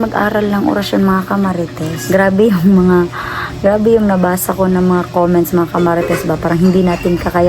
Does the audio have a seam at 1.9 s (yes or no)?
yes